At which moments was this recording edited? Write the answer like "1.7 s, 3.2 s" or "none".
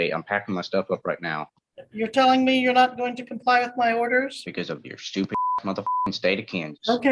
4.4 s